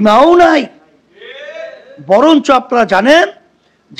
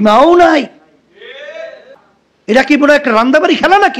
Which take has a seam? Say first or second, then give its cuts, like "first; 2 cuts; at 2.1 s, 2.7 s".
second; 1 cut; at 2.0 s